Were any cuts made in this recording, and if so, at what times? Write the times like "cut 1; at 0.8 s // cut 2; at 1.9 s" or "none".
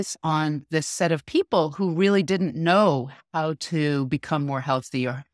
none